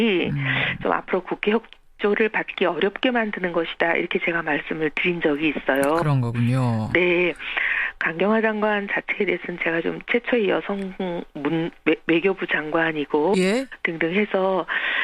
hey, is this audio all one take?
no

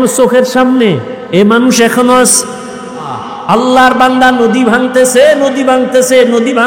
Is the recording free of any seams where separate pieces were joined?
no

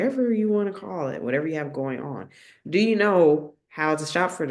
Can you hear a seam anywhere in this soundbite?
no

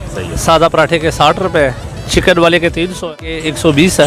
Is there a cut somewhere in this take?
yes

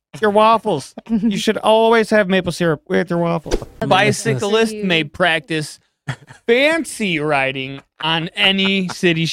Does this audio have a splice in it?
yes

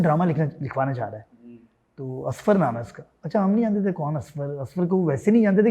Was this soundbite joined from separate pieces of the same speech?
no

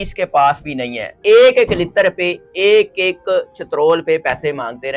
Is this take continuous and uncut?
no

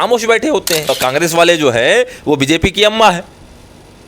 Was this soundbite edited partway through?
yes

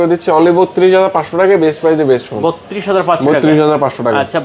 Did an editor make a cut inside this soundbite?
no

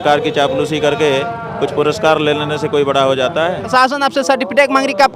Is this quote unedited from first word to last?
no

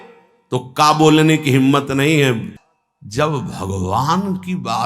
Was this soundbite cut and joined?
yes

